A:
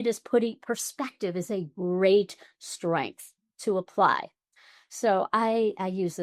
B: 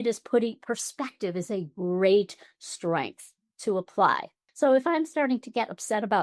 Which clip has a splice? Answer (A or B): B